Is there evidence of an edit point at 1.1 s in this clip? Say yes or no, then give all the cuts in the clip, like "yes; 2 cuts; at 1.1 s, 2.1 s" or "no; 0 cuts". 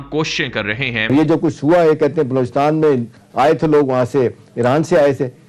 yes; 1 cut; at 1.1 s